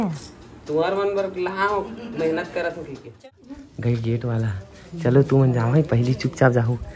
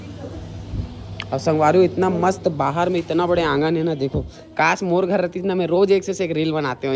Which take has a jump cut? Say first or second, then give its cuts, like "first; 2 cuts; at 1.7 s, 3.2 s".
first; 1 cut; at 3.2 s